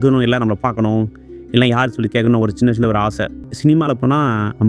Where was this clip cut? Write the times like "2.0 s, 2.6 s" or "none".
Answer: 3.5 s